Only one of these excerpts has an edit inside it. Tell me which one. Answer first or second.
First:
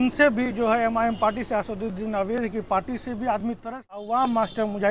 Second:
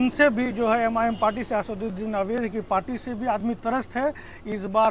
first